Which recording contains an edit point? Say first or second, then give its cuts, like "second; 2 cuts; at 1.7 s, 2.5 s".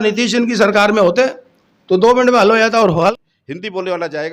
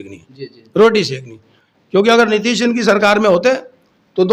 first; 1 cut; at 3.1 s